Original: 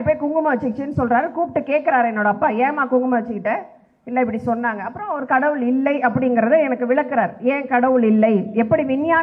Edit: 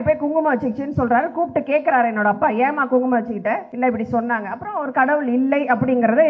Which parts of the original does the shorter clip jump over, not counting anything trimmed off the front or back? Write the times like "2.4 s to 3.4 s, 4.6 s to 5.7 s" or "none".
3.7 s to 4.0 s

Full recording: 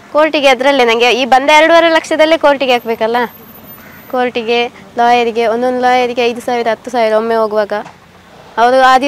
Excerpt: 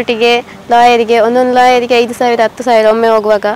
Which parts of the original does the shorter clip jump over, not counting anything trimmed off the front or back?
none

